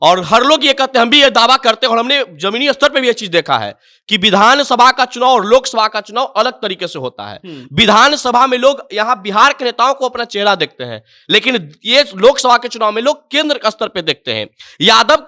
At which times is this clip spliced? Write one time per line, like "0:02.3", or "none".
none